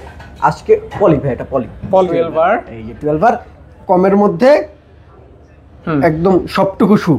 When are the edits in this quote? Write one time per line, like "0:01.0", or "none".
0:02.1